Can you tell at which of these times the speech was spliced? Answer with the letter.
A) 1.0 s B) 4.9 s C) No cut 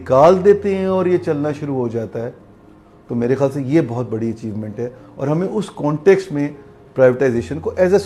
C